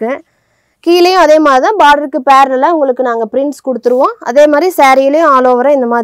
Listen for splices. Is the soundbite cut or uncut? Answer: uncut